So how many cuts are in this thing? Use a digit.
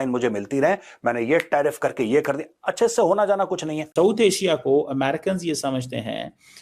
1